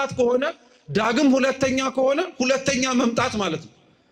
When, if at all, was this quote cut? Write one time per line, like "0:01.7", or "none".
none